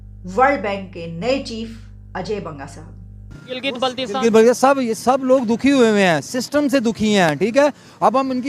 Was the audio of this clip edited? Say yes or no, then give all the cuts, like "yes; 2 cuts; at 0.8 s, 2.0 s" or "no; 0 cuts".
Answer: yes; 1 cut; at 3.4 s